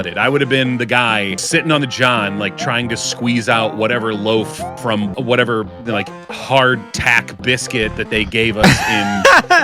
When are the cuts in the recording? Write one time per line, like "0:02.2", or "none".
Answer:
0:01.4
0:05.1